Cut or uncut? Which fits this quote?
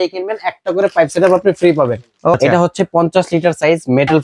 cut